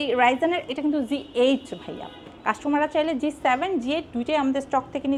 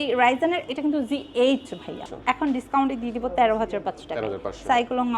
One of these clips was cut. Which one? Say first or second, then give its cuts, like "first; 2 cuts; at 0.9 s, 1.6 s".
second; 1 cut; at 2.1 s